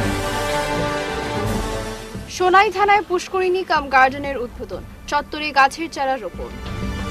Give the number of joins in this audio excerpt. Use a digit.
1